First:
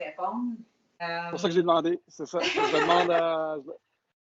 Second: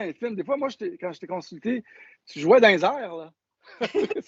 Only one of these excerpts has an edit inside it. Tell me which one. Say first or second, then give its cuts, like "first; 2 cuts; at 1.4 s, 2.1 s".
first; 1 cut; at 1.0 s